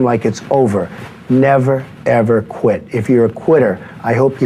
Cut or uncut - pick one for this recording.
uncut